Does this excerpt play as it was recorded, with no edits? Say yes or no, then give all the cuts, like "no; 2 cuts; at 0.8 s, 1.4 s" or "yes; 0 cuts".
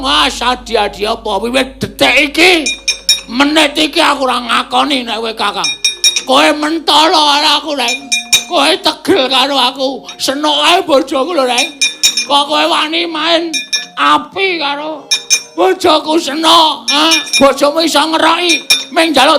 no; 1 cut; at 17.2 s